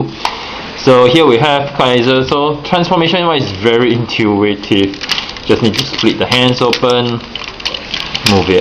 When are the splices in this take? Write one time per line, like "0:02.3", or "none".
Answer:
0:02.7